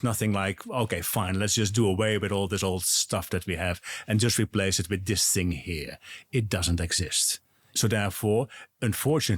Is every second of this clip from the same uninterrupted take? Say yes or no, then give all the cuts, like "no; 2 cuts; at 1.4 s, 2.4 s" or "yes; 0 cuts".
no; 1 cut; at 7.7 s